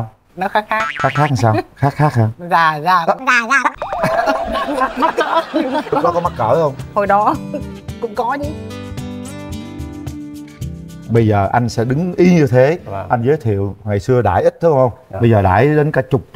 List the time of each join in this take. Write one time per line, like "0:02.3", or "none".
none